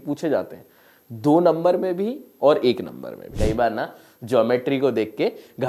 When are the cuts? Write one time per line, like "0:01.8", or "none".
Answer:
0:03.3